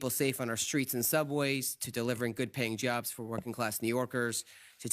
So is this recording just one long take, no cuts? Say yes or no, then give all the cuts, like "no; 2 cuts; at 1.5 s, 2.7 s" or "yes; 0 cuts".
no; 1 cut; at 1.6 s